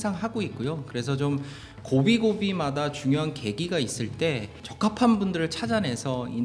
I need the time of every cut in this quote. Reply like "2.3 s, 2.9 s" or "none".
4.6 s